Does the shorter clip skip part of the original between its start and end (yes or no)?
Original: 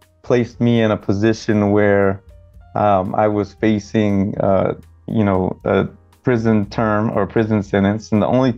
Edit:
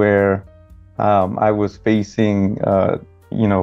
no